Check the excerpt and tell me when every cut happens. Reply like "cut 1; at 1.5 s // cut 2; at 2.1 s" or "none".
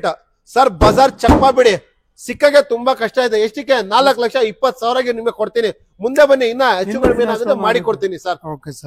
none

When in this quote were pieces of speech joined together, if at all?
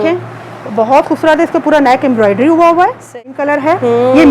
cut 1; at 3.4 s

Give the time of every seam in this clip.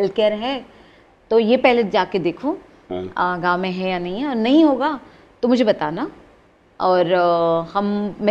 none

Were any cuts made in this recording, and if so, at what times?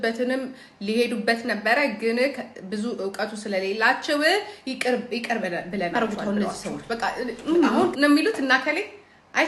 cut 1; at 5.9 s

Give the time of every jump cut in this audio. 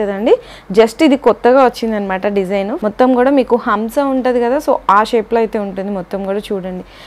cut 1; at 2.7 s

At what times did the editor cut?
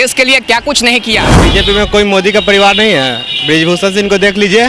cut 1; at 1.4 s

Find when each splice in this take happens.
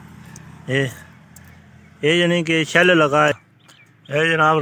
cut 1; at 3.4 s

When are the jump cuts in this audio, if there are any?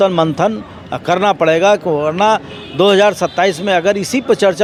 none

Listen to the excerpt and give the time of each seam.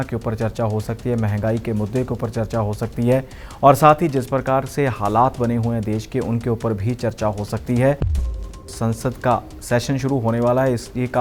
cut 1; at 8.4 s

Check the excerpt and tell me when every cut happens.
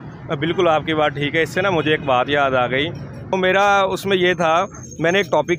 cut 1; at 3.3 s

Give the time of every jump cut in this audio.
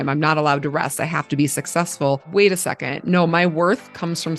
cut 1; at 2.3 s

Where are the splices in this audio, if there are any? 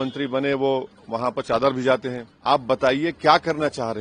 cut 1; at 2.3 s

